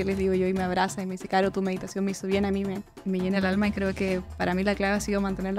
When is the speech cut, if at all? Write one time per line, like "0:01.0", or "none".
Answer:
0:02.9